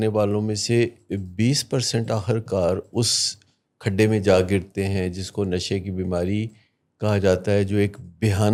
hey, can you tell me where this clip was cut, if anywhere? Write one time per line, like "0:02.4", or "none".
none